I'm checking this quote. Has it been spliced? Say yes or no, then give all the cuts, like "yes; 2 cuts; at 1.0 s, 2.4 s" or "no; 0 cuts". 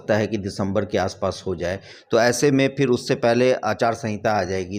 no; 0 cuts